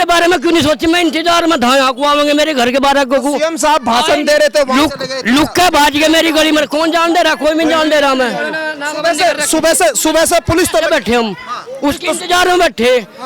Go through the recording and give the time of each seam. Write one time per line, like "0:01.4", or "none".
none